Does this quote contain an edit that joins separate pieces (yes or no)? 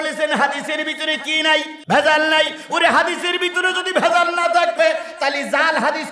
yes